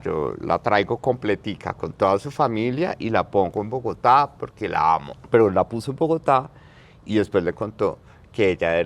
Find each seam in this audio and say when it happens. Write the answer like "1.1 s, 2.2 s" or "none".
5.1 s